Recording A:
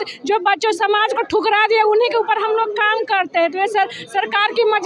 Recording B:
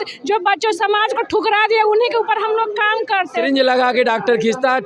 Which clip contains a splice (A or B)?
B